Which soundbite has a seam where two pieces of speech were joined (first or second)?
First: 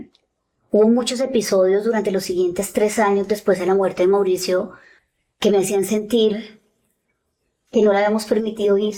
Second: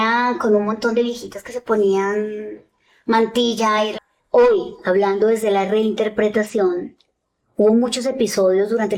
second